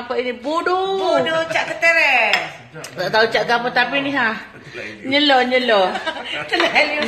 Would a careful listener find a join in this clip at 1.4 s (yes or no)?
no